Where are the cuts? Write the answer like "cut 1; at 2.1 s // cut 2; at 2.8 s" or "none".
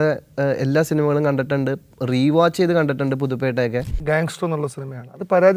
cut 1; at 4.0 s